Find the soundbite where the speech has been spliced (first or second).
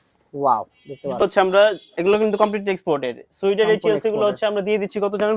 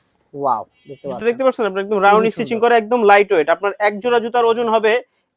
first